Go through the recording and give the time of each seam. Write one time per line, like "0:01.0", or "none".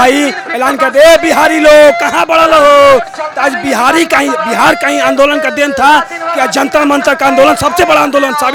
none